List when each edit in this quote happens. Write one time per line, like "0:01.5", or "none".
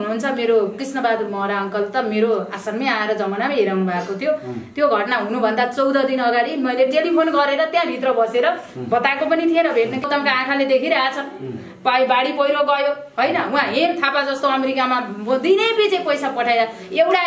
0:10.1